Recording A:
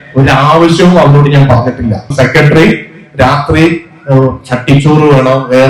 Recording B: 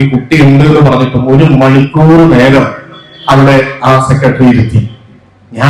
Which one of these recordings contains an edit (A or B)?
A